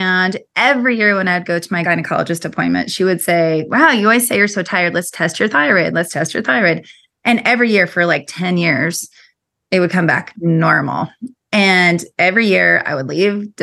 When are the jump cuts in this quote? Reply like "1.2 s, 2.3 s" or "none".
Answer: 1.8 s